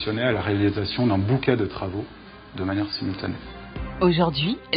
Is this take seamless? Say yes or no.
yes